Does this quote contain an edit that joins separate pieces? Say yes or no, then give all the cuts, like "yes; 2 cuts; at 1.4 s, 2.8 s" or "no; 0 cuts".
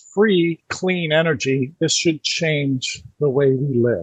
no; 0 cuts